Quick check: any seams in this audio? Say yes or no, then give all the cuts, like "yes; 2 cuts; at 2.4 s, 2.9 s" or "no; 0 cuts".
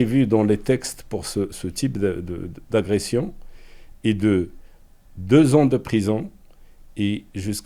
no; 0 cuts